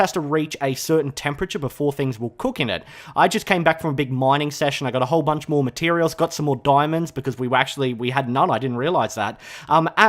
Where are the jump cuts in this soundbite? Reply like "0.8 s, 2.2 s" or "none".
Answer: 9.1 s